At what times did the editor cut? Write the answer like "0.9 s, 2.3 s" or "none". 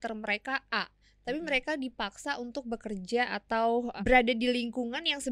3.9 s